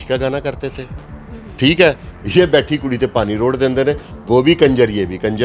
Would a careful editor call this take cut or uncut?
uncut